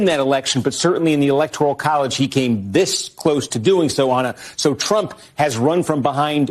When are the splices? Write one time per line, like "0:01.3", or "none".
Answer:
none